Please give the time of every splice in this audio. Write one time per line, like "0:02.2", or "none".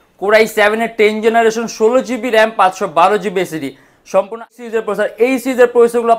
0:04.5